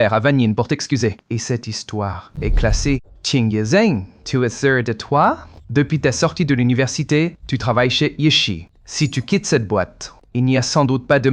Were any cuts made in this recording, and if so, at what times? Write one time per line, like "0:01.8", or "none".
0:03.1